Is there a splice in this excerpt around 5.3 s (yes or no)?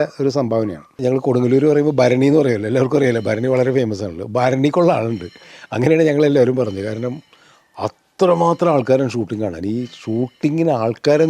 no